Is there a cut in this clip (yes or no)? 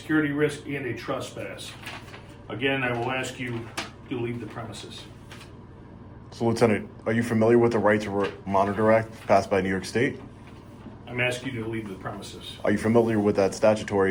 no